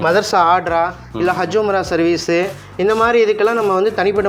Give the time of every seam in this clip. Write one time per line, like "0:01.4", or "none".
none